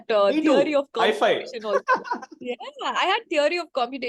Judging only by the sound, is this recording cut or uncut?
uncut